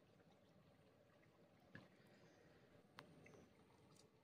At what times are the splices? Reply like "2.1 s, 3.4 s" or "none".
2.8 s